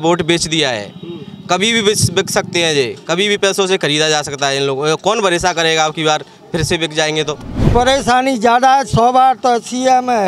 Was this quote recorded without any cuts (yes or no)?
no